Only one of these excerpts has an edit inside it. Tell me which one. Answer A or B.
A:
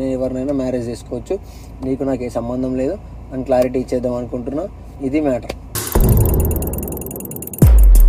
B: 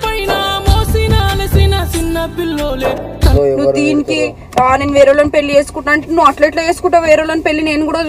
B